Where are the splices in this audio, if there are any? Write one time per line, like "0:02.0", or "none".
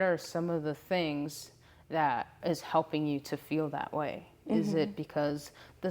0:02.3